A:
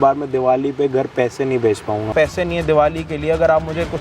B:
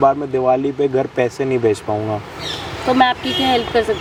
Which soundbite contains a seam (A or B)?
A